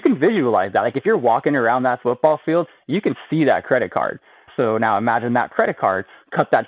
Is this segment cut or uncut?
cut